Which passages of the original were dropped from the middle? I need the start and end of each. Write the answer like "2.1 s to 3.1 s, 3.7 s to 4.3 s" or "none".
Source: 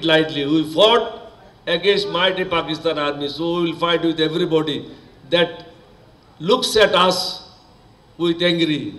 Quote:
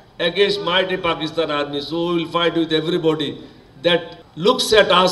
5.7 s to 6.2 s

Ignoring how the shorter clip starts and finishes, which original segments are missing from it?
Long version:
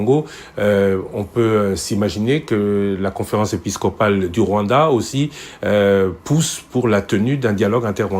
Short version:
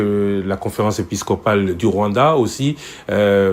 none

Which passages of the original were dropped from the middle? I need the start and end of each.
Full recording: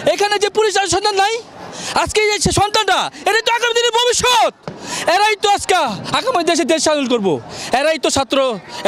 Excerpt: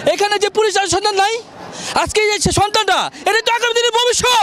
none

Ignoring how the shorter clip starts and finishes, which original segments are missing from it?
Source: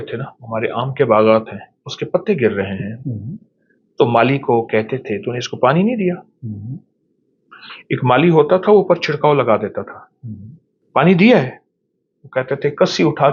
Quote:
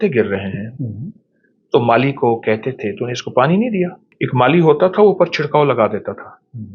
6.3 s to 7.7 s

